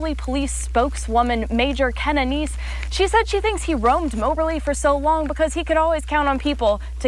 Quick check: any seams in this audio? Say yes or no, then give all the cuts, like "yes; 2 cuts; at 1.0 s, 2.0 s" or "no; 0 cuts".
no; 0 cuts